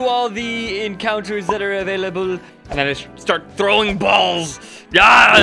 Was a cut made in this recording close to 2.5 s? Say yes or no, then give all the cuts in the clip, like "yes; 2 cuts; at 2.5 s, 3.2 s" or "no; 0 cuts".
yes; 1 cut; at 2.5 s